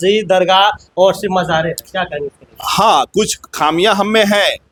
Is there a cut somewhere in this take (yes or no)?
no